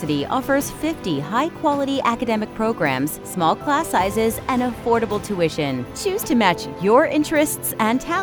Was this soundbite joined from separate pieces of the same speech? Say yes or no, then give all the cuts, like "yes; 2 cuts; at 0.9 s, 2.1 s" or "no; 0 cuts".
no; 0 cuts